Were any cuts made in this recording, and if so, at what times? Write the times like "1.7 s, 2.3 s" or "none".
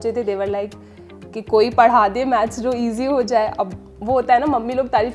none